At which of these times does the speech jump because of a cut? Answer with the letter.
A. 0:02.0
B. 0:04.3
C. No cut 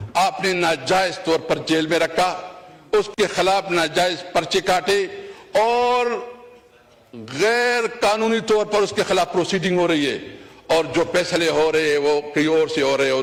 C